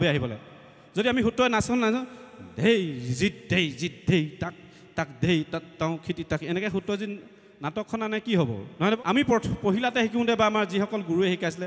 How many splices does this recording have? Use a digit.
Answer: 1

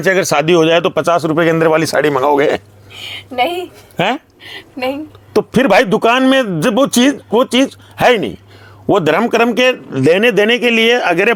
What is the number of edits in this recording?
0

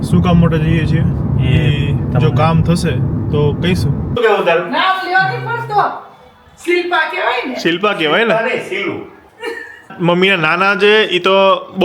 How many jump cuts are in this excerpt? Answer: 2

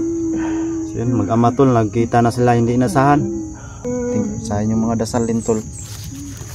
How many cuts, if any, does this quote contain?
1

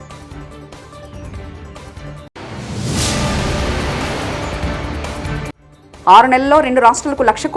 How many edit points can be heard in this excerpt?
3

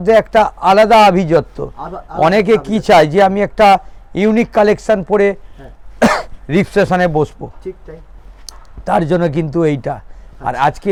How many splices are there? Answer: 0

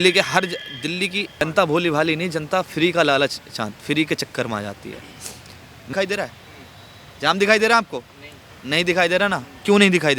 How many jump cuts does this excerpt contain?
2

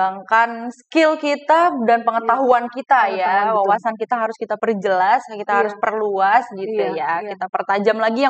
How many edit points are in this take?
0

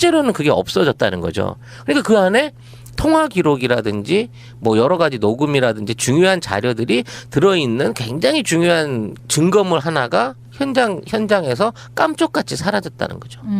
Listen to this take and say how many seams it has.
1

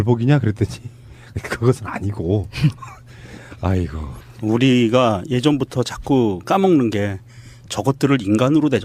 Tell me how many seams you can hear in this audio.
1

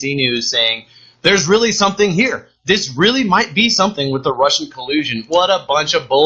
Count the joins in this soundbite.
1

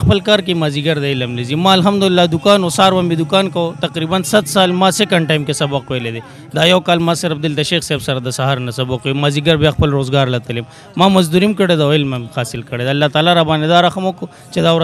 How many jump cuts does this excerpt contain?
0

